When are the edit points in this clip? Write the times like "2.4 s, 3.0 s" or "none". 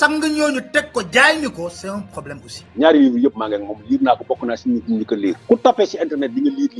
2.6 s